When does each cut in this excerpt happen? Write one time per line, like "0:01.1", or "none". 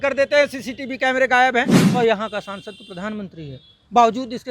0:01.8